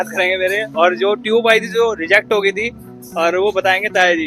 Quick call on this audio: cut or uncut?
uncut